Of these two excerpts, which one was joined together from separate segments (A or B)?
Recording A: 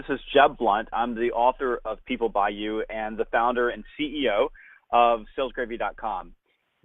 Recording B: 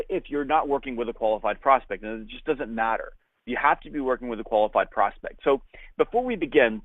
B